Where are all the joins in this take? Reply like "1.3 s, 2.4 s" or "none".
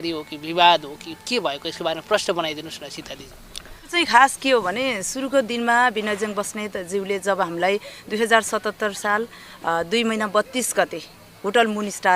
3.9 s